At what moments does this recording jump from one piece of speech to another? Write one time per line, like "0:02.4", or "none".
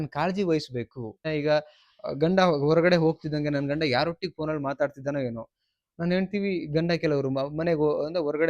0:01.2